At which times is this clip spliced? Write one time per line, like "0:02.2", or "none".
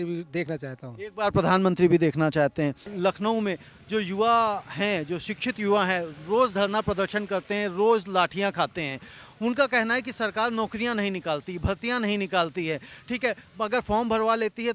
0:02.9